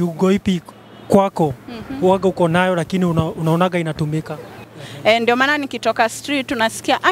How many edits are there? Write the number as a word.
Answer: one